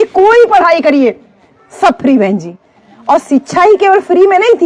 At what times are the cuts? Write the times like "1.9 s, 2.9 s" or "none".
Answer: none